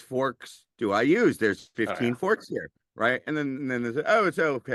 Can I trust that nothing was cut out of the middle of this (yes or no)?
yes